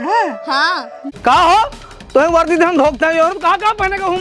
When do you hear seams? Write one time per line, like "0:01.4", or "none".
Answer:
0:01.1